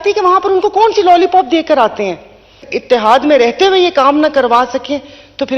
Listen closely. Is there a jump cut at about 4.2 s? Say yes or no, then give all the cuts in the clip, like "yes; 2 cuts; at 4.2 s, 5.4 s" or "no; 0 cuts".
no; 1 cut; at 2.7 s